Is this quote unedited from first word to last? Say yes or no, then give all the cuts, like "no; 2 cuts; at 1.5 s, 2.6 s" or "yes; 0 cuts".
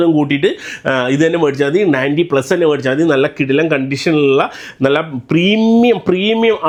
yes; 0 cuts